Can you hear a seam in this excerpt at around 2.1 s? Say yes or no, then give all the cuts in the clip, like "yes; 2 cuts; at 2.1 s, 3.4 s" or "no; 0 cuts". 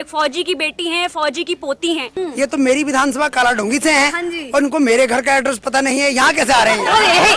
yes; 1 cut; at 2.1 s